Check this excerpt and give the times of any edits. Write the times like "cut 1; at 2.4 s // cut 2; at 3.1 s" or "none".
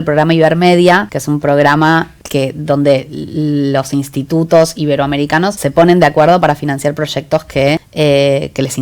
cut 1; at 1.1 s // cut 2; at 2.2 s // cut 3; at 5.6 s // cut 4; at 7.9 s